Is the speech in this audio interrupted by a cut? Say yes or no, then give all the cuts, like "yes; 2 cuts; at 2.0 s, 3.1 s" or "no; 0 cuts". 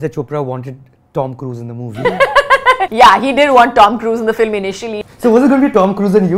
yes; 2 cuts; at 2.9 s, 4.9 s